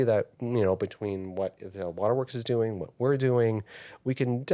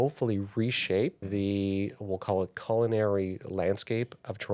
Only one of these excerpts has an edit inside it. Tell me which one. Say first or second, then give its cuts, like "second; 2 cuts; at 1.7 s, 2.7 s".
second; 1 cut; at 1.2 s